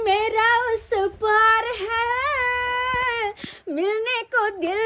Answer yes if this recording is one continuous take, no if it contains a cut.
yes